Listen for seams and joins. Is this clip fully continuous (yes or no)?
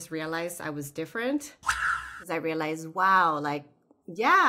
no